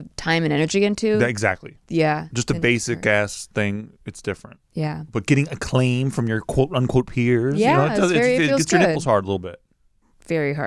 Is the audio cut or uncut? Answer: uncut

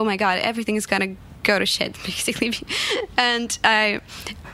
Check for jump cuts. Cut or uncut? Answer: uncut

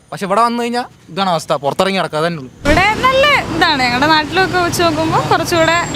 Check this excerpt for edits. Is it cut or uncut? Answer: cut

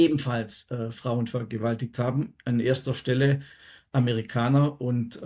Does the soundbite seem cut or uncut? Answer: uncut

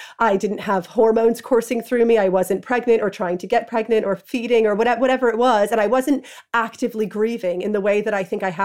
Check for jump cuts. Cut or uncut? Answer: uncut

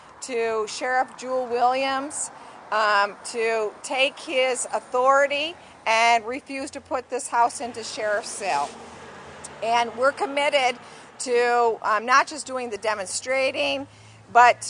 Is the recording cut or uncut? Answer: cut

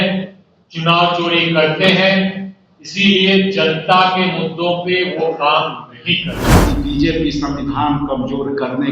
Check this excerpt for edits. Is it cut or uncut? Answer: cut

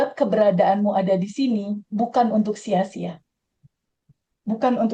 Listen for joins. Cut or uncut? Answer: uncut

